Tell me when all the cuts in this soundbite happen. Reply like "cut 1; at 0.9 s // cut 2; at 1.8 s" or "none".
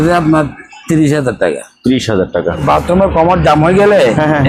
cut 1; at 2.6 s